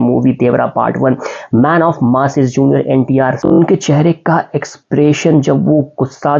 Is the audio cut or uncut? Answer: cut